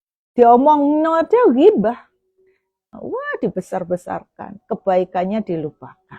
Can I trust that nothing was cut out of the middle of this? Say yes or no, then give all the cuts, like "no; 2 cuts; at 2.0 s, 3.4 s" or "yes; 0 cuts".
no; 1 cut; at 3.0 s